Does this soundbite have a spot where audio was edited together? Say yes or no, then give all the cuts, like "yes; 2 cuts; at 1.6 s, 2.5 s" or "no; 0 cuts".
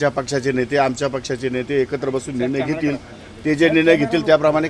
no; 0 cuts